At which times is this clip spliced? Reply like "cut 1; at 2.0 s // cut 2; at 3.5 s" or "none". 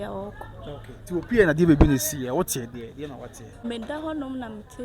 cut 1; at 3.6 s